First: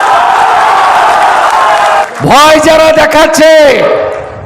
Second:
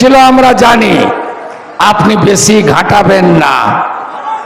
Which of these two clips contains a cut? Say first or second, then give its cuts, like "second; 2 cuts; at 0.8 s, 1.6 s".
first; 1 cut; at 1.9 s